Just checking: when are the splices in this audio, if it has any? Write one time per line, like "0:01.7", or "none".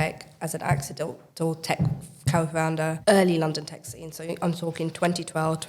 0:01.2